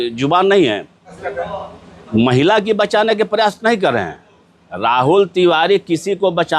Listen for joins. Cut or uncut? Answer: cut